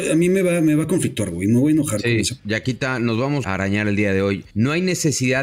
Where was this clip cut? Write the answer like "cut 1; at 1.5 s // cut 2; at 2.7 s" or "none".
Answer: cut 1; at 2.0 s // cut 2; at 3.5 s // cut 3; at 4.5 s